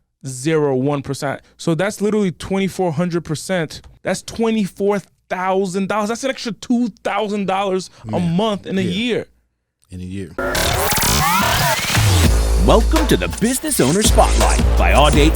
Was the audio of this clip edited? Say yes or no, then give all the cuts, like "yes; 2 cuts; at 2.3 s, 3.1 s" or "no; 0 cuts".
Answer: yes; 3 cuts; at 1.5 s, 3.9 s, 10.3 s